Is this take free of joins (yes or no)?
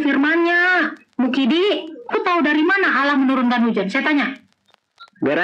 no